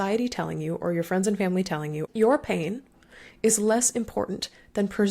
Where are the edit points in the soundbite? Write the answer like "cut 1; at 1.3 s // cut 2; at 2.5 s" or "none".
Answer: cut 1; at 2.0 s